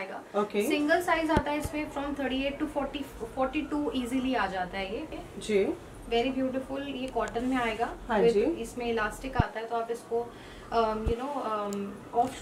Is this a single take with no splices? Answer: no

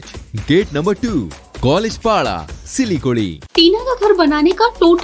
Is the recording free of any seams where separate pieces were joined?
no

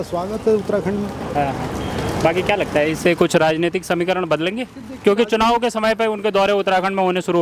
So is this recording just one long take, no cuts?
yes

